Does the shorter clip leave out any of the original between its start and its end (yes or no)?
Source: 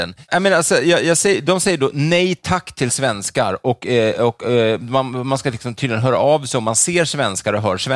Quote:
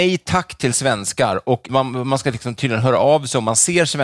yes